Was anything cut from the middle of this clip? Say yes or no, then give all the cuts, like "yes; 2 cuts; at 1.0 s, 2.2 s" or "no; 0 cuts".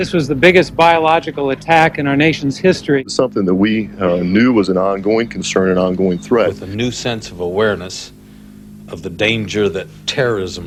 no; 0 cuts